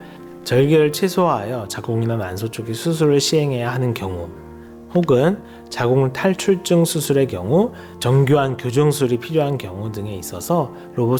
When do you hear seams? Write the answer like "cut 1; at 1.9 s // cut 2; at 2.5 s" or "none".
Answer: none